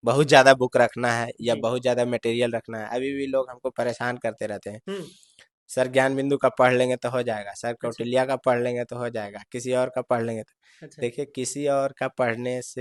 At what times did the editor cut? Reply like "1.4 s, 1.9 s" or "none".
none